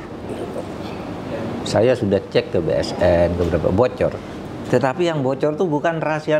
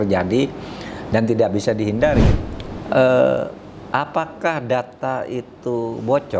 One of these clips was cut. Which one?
second; 1 cut; at 2.3 s

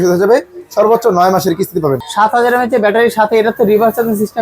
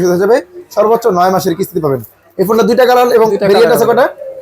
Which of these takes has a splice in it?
first; 1 cut; at 2.0 s

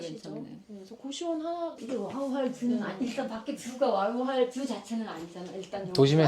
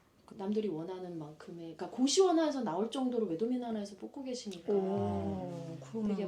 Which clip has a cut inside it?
first; 1 cut; at 1.8 s

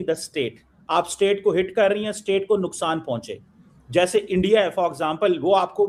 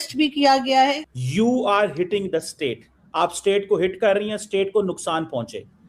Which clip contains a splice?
second; 1 cut; at 1.0 s

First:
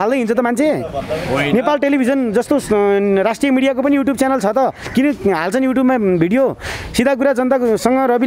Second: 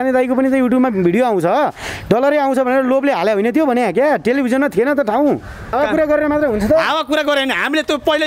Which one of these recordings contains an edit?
second; 1 cut; at 5.7 s

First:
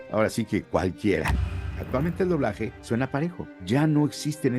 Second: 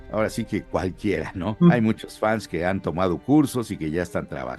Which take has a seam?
first; 3 cuts; at 1.6 s, 2.8 s, 3.5 s

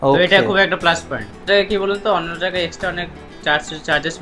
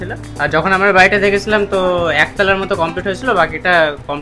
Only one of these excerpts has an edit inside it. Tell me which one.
first; 1 cut; at 1.4 s

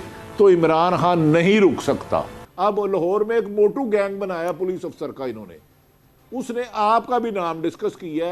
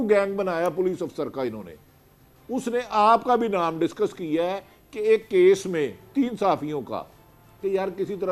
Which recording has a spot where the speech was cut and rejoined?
first; 1 cut; at 2.4 s

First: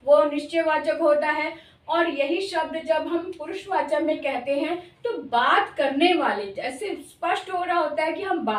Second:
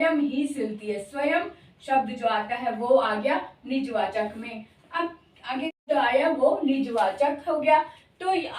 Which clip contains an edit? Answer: second; 1 cut; at 5.8 s

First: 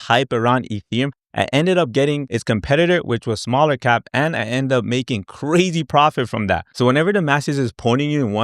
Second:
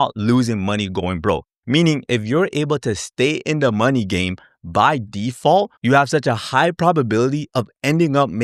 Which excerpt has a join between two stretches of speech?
first; 1 cut; at 2.3 s

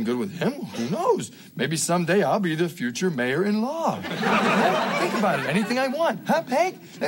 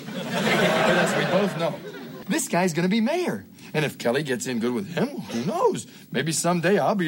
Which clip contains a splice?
second; 1 cut; at 2.1 s

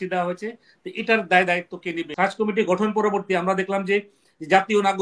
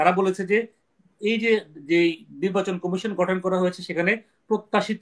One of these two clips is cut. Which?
first; 1 cut; at 2.1 s

